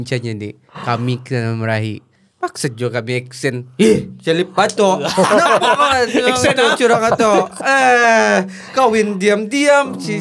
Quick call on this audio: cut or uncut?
uncut